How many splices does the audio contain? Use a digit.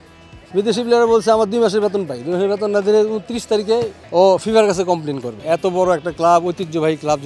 2